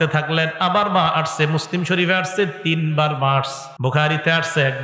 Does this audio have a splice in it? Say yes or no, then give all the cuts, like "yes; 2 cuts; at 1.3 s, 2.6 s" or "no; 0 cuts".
yes; 1 cut; at 3.6 s